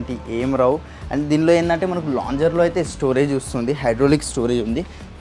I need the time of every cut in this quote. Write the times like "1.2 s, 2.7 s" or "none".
none